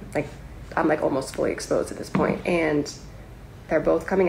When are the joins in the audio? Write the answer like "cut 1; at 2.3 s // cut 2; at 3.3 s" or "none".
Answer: none